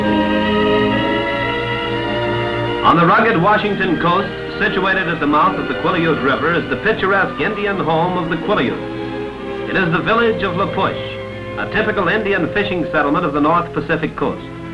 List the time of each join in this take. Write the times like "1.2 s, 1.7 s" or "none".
none